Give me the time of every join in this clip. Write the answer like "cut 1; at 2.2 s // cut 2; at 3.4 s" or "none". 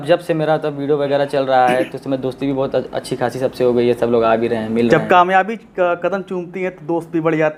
none

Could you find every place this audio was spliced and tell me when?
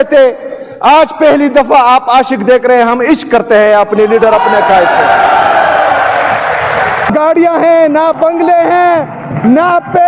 cut 1; at 7.1 s

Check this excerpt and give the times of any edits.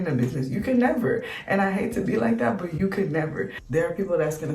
cut 1; at 3.6 s

